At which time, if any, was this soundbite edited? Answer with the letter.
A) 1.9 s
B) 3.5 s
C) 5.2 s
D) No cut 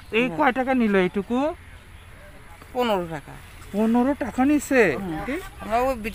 C